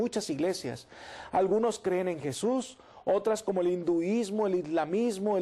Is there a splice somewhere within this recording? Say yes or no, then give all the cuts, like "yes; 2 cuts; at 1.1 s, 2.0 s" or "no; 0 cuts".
no; 0 cuts